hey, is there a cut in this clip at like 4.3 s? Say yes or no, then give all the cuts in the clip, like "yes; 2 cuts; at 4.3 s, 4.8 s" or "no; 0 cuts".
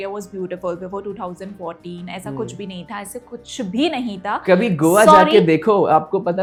no; 0 cuts